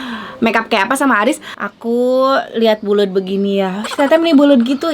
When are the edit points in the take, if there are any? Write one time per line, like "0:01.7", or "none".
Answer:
0:01.5